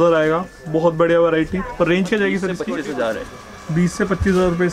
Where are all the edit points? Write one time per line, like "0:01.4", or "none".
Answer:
0:02.6